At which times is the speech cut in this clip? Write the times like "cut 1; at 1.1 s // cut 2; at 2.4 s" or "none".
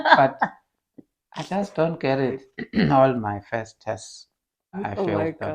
cut 1; at 2.4 s // cut 2; at 4.8 s